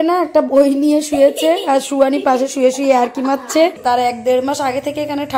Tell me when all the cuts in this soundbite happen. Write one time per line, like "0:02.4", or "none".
0:03.8